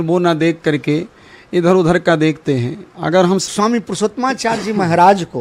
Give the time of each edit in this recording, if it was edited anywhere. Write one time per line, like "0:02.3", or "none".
0:03.4